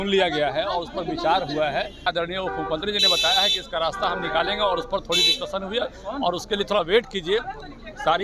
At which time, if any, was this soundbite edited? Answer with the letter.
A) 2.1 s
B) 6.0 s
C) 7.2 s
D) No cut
A